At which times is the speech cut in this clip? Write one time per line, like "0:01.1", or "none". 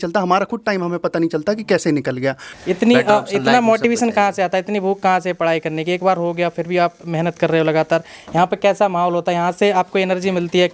0:02.5